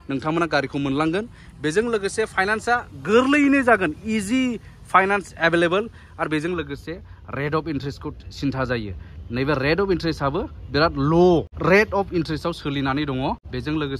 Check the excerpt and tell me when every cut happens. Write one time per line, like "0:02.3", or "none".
none